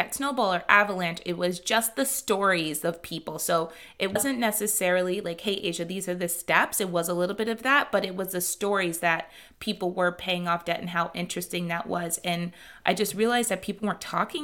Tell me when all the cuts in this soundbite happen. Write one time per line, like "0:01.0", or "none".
0:04.2